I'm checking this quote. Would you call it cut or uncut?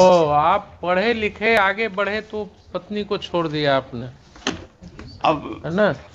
uncut